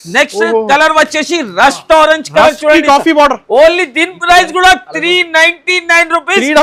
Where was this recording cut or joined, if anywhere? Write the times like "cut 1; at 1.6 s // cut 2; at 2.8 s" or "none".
none